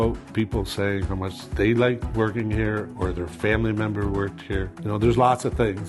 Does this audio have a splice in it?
yes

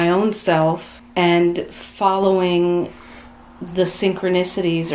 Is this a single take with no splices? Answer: no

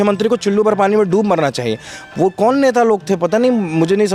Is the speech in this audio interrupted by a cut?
no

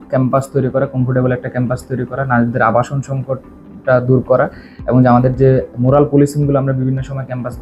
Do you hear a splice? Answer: no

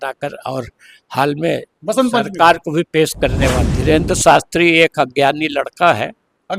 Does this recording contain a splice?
yes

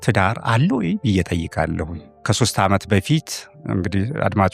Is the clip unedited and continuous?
no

